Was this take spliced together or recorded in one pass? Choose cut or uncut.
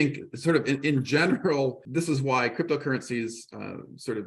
cut